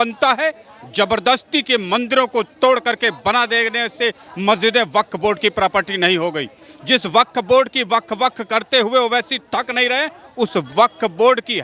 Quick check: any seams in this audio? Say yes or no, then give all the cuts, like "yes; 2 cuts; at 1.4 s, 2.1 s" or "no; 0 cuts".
no; 0 cuts